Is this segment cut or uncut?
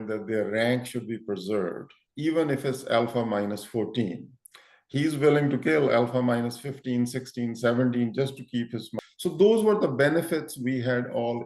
cut